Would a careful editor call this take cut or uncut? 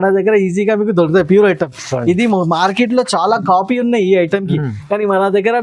uncut